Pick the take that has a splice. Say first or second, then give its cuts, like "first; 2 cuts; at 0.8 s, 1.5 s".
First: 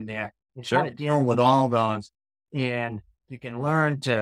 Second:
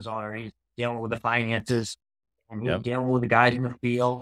first; 1 cut; at 3.1 s